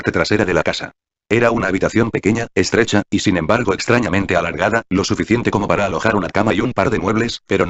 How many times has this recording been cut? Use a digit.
1